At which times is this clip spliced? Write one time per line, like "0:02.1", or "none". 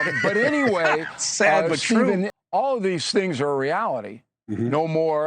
0:02.3